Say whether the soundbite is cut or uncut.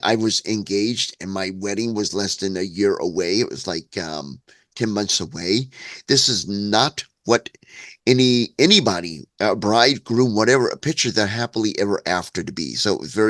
uncut